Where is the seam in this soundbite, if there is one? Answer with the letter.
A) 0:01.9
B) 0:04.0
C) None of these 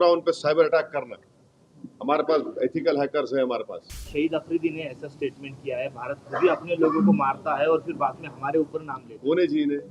B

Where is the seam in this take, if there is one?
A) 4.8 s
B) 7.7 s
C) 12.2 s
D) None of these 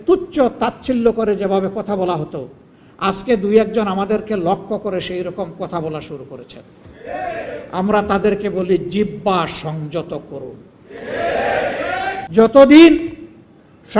C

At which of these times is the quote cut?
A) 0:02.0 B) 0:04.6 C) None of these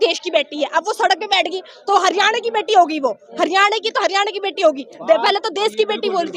C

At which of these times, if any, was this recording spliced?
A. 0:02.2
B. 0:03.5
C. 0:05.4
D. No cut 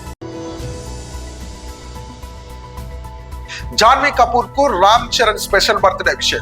B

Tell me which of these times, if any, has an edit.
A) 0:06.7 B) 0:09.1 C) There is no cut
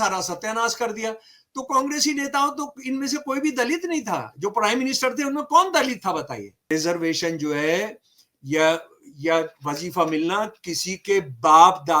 A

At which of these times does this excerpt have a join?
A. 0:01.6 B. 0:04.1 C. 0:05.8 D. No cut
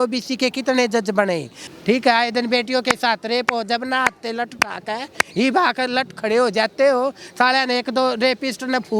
A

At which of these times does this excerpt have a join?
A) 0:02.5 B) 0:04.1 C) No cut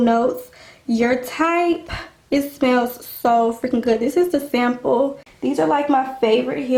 C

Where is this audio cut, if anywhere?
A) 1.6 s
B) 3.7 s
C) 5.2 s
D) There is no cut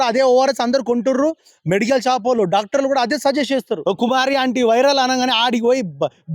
B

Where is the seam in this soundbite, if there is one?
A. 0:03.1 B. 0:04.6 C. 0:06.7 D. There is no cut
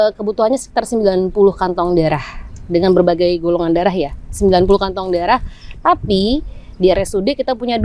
D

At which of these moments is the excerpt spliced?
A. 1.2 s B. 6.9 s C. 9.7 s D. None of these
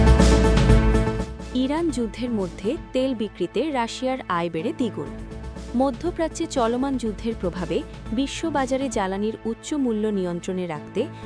D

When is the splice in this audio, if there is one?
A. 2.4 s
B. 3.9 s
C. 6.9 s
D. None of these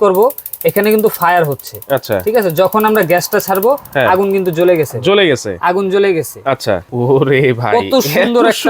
C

